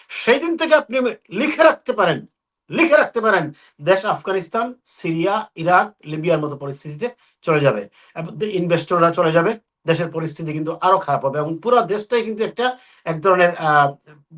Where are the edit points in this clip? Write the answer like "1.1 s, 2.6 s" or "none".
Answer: none